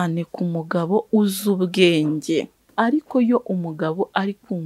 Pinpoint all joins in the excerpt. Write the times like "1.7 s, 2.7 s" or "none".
2.6 s